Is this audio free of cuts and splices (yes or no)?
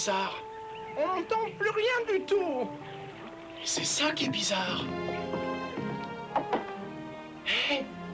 no